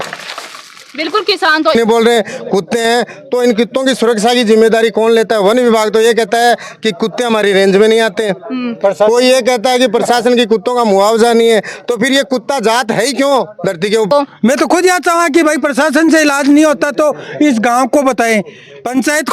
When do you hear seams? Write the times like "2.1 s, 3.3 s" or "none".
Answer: 1.8 s, 14.1 s